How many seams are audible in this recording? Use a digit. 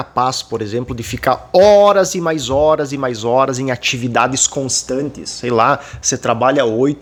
0